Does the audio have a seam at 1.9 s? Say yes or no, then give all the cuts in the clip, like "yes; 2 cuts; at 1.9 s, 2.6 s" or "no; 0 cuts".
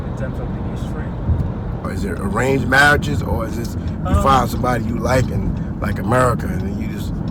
yes; 1 cut; at 1.9 s